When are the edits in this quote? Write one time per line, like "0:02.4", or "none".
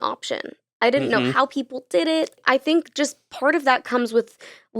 0:02.4